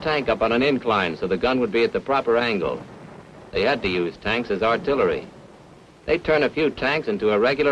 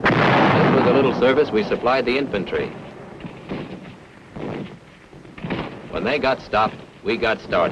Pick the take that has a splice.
first; 1 cut; at 6.4 s

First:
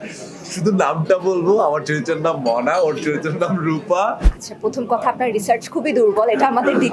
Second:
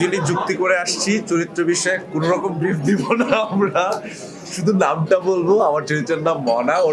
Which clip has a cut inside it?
first; 1 cut; at 4.3 s

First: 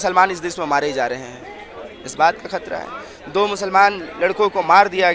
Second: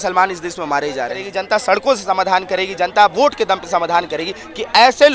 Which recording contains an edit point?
second; 1 cut; at 1.3 s

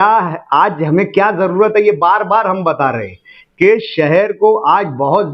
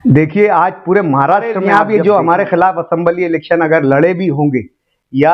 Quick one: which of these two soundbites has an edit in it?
second; 1 cut; at 1.6 s

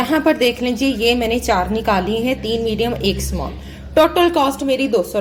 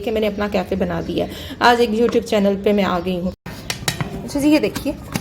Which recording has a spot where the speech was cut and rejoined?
second; 1 cut; at 3.7 s

